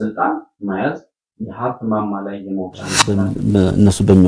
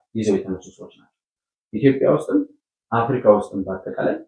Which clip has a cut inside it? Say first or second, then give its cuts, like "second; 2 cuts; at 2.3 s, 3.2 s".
first; 1 cut; at 3.0 s